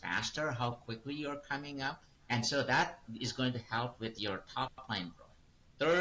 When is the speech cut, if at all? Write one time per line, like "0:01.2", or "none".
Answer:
0:02.1